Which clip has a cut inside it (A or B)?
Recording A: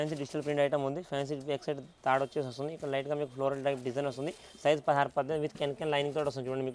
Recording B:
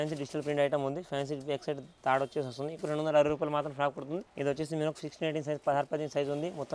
B